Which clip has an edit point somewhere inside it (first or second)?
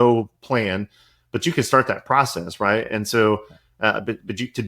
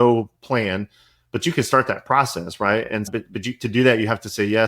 second